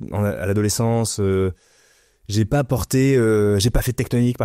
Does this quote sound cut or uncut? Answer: uncut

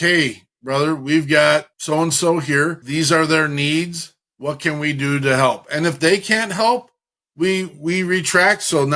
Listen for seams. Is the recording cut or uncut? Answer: cut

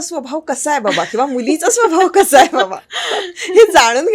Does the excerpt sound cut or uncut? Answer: uncut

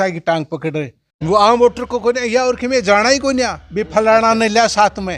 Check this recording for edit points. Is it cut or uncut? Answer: cut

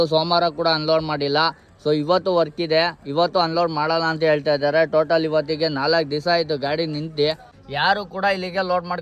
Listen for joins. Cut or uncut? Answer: cut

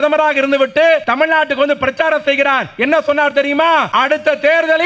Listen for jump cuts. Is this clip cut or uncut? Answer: cut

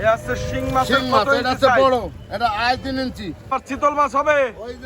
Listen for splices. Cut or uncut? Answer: cut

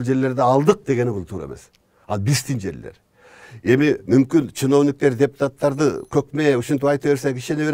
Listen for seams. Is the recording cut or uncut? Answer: uncut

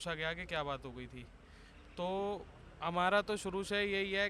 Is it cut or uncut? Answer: uncut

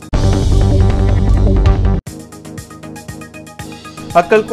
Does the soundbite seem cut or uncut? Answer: uncut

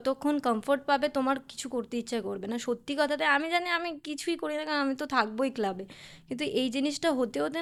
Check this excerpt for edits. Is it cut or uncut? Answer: uncut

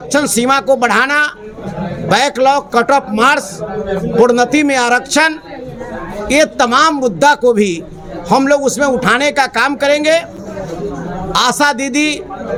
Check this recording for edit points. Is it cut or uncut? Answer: uncut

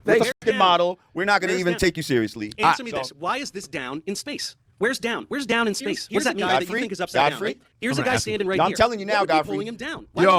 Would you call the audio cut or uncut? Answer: uncut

